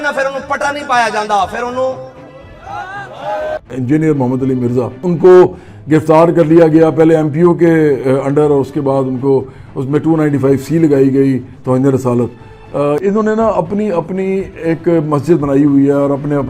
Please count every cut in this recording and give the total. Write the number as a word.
one